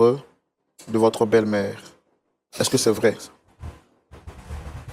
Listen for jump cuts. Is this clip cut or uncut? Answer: uncut